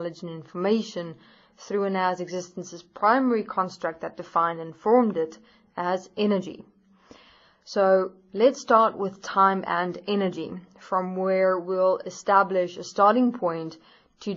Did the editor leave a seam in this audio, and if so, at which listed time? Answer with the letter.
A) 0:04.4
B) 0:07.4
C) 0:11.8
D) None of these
D